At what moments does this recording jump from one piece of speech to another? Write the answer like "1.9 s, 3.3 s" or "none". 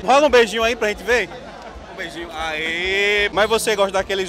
3.3 s